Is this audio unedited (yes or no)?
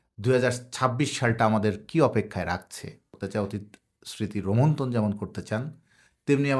no